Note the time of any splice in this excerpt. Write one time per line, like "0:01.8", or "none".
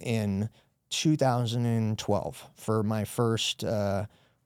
0:02.5